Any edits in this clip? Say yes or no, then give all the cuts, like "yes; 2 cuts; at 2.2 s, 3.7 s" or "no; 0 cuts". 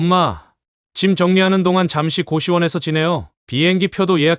no; 0 cuts